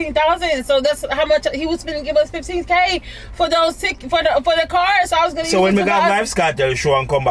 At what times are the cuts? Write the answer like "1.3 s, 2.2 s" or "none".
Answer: none